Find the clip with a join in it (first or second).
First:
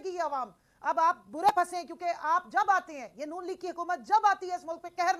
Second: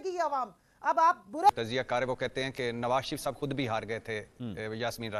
second